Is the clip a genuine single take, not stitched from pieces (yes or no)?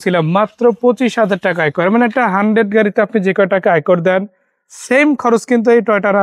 yes